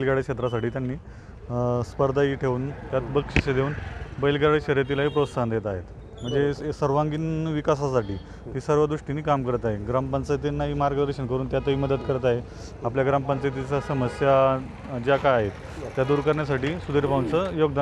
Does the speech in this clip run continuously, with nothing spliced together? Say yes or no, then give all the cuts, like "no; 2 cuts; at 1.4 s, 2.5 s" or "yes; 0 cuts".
yes; 0 cuts